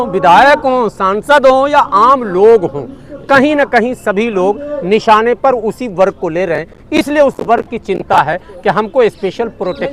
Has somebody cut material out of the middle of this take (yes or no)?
no